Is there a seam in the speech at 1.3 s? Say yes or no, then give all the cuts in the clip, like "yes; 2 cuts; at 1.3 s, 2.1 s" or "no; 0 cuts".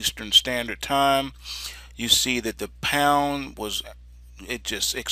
no; 1 cut; at 4.0 s